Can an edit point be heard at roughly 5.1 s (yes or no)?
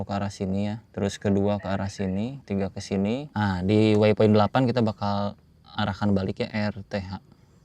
no